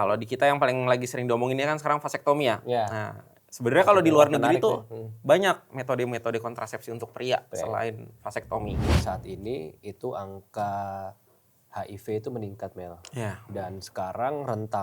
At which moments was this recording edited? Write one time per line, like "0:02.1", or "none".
0:09.0